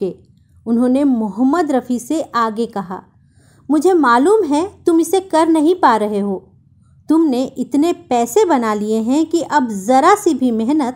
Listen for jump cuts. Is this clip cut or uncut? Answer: uncut